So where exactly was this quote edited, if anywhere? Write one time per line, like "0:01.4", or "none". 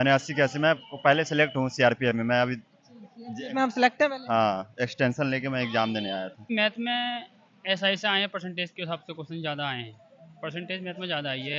0:06.5